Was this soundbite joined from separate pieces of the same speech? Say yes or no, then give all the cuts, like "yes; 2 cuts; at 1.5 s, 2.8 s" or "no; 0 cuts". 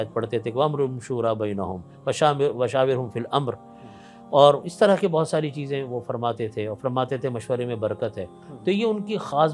no; 0 cuts